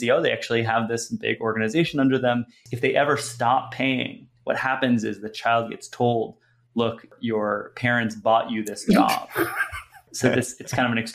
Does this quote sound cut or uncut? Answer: cut